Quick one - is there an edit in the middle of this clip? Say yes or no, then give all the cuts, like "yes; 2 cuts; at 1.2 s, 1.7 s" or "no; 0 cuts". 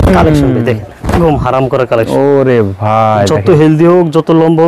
no; 0 cuts